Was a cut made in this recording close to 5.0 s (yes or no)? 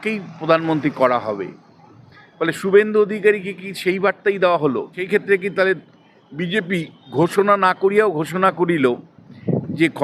yes